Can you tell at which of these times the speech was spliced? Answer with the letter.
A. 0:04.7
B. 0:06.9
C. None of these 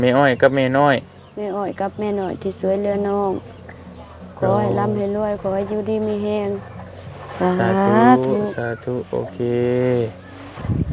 C